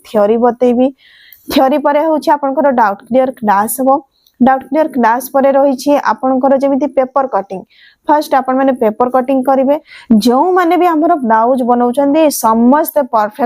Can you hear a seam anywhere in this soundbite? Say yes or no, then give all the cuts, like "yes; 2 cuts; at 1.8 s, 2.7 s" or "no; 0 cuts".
yes; 1 cut; at 9.9 s